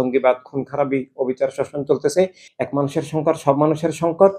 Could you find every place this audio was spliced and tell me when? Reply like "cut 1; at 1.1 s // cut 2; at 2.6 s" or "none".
cut 1; at 2.4 s